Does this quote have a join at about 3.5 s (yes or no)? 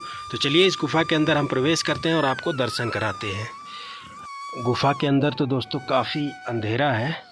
no